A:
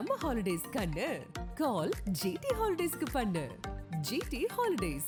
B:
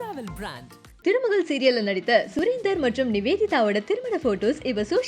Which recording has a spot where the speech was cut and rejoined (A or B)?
B